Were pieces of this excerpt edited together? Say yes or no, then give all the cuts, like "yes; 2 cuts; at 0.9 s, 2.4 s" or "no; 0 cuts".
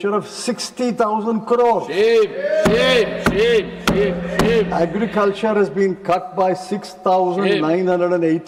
no; 0 cuts